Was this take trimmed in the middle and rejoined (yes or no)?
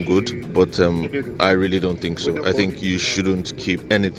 no